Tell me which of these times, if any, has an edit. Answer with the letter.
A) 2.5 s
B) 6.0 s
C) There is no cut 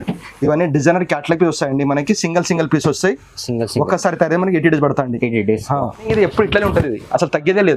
B